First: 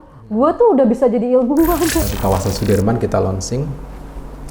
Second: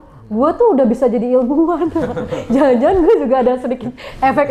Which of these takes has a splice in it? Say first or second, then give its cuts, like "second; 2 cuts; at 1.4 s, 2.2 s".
first; 1 cut; at 2.1 s